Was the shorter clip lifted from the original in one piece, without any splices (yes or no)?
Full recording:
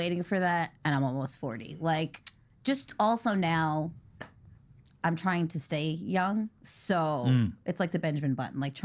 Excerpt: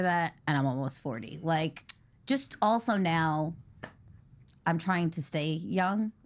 yes